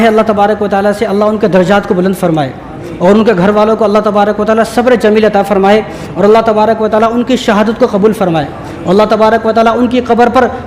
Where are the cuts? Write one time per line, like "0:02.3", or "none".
none